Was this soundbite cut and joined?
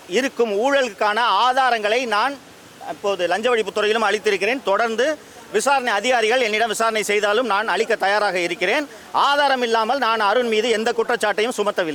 no; 0 cuts

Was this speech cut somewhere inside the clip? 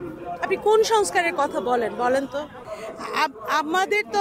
yes; 1 cut; at 2.6 s

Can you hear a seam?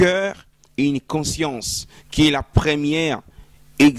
no; 0 cuts

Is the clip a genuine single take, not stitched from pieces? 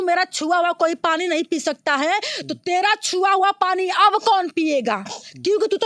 yes; 0 cuts

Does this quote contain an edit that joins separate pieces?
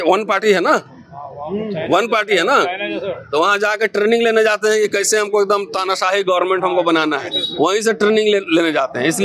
no; 0 cuts

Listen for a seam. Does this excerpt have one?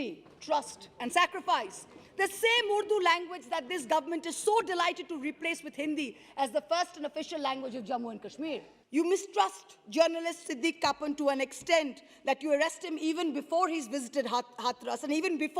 yes; 1 cut; at 8.7 s

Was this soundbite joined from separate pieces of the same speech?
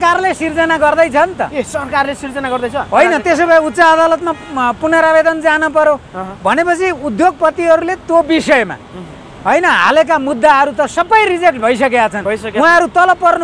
no; 0 cuts

